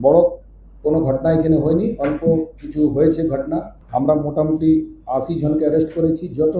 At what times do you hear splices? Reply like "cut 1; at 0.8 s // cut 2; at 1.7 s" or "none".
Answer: cut 1; at 3.8 s